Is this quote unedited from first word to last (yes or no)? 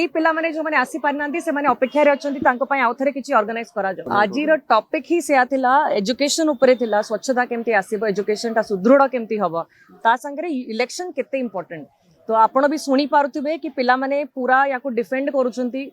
no